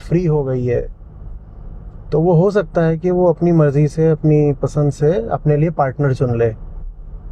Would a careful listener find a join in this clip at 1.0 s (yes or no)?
no